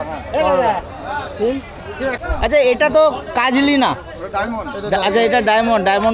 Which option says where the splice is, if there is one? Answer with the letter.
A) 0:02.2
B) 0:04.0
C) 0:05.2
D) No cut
A